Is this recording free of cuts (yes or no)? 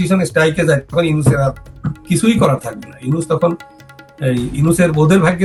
yes